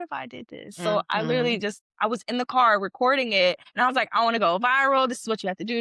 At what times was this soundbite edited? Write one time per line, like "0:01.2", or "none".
0:03.7